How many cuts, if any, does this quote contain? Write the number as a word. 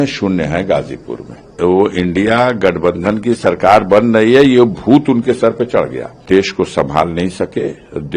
two